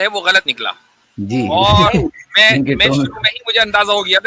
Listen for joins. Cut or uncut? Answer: uncut